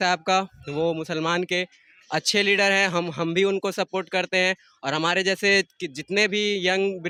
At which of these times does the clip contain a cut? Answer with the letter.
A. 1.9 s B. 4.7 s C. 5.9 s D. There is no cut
D